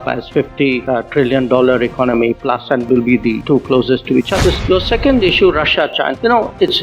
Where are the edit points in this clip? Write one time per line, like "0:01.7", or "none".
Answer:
0:04.4